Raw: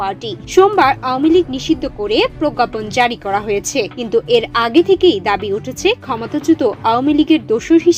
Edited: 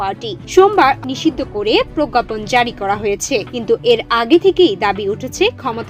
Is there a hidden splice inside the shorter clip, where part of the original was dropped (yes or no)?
yes